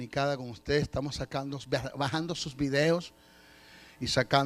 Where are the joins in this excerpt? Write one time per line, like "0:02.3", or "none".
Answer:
0:02.2